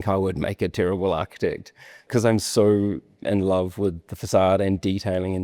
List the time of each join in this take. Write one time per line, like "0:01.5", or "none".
0:02.1